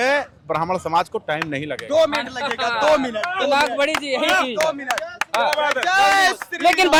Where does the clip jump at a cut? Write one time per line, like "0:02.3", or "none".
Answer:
none